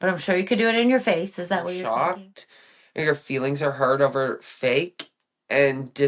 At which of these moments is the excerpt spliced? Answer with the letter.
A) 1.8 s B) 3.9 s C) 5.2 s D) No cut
A